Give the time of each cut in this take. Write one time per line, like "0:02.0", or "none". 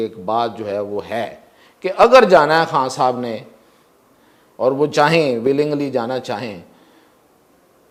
none